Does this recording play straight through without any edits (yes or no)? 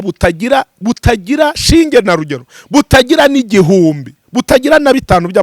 yes